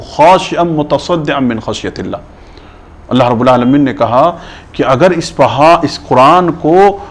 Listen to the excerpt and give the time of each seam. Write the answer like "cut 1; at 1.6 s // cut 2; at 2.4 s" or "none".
none

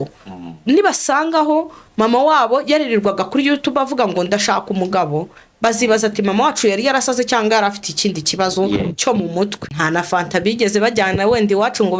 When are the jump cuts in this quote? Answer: cut 1; at 9.7 s

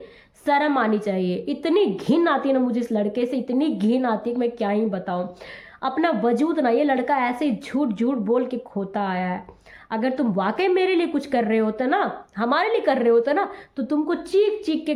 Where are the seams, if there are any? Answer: none

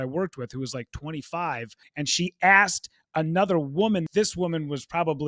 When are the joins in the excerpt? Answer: cut 1; at 1.8 s // cut 2; at 4.1 s

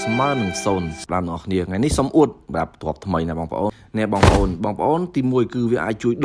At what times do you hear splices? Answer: cut 1; at 1.0 s // cut 2; at 3.8 s

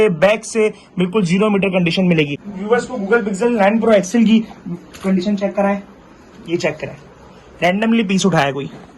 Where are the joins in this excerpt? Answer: cut 1; at 2.5 s

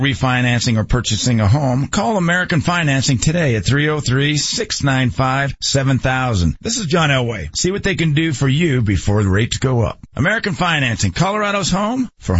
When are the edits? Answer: none

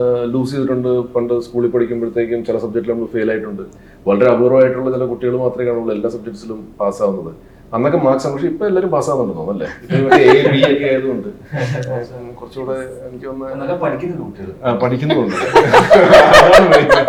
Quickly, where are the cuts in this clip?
none

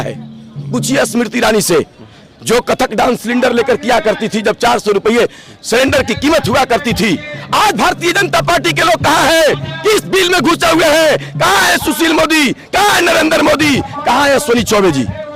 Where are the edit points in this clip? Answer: none

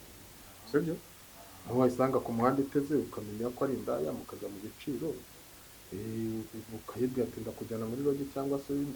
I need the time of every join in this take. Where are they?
none

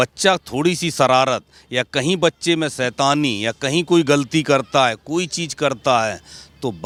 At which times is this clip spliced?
none

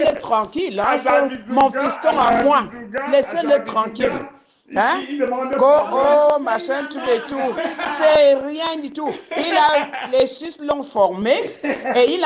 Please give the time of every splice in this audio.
none

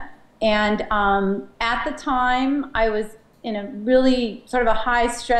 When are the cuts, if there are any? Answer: cut 1; at 4.2 s

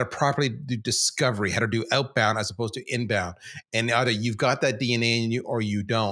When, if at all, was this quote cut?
none

